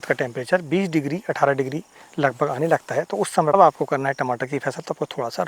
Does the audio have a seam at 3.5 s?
yes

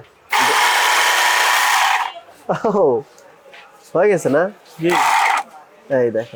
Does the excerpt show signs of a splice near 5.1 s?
no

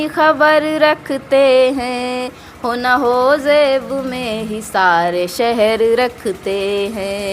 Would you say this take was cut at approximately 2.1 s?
no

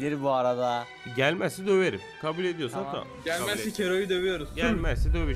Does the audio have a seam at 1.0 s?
yes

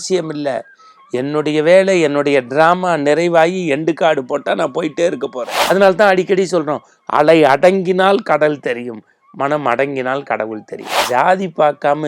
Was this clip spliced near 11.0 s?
yes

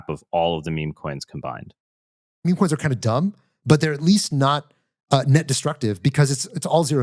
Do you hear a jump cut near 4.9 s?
no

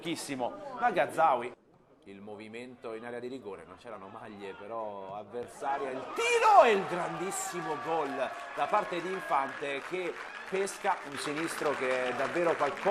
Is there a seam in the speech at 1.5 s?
no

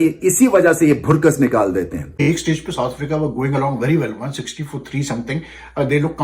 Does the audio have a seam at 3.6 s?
no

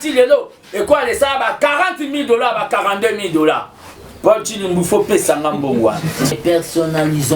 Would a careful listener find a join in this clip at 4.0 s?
no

